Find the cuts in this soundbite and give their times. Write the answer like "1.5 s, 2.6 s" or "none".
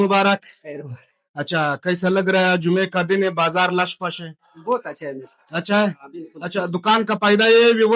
none